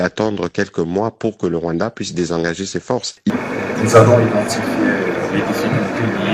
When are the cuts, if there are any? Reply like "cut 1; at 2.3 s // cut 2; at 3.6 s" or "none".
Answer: cut 1; at 3.3 s